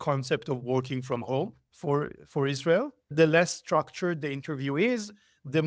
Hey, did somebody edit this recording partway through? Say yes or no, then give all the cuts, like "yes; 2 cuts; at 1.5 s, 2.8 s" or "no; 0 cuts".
yes; 2 cuts; at 1.7 s, 3.1 s